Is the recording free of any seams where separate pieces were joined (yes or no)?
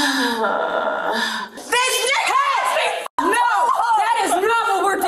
no